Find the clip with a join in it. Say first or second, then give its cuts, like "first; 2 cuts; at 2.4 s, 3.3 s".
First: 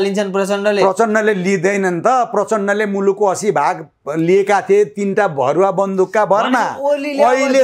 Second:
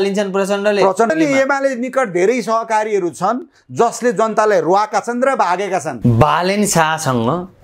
second; 2 cuts; at 1.1 s, 5.9 s